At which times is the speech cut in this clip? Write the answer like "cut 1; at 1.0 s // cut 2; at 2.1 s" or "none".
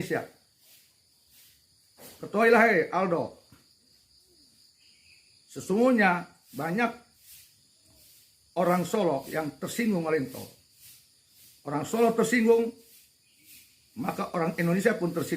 none

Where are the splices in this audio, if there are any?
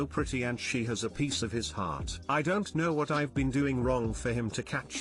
none

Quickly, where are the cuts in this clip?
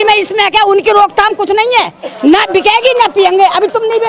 cut 1; at 2.1 s

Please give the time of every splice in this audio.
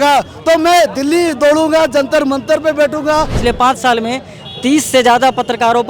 cut 1; at 3.4 s

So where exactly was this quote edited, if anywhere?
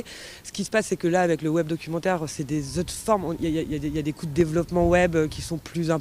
none

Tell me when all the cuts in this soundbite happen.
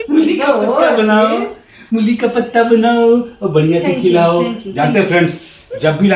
none

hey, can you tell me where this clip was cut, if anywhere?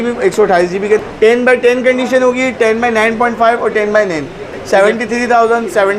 cut 1; at 1.0 s // cut 2; at 4.5 s

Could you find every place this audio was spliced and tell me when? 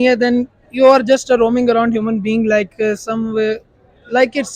none

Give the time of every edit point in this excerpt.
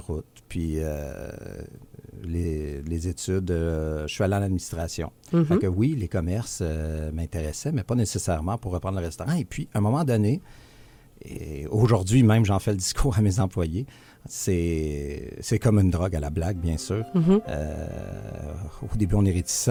none

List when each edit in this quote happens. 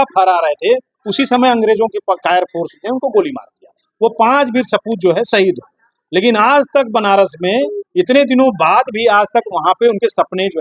none

